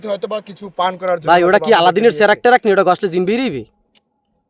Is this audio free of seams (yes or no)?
yes